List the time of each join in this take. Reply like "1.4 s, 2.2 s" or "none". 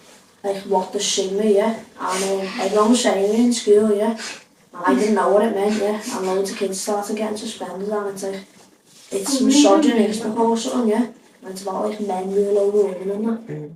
none